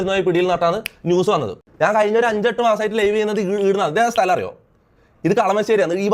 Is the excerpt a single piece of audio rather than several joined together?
no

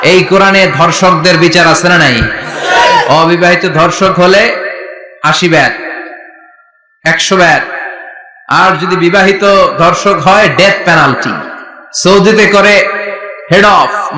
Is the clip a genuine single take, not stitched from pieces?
yes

